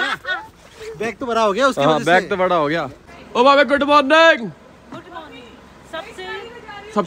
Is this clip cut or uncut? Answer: uncut